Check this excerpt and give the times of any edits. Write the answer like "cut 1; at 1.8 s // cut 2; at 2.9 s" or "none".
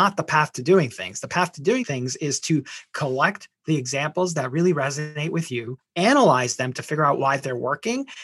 cut 1; at 1.8 s // cut 2; at 5.8 s